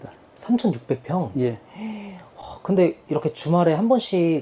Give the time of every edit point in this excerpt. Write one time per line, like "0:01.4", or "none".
none